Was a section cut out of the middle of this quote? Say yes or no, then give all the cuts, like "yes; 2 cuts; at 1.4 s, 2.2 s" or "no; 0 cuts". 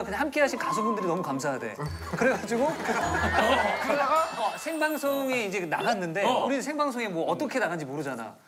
no; 0 cuts